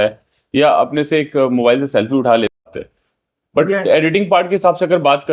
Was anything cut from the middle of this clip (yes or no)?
yes